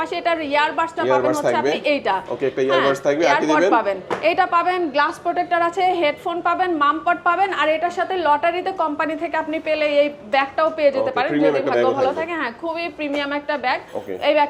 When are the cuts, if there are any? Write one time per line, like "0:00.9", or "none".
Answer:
none